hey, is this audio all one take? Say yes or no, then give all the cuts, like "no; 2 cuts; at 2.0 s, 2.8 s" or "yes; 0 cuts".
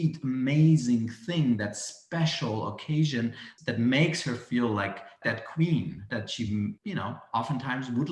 no; 4 cuts; at 3.5 s, 5.1 s, 6.0 s, 6.8 s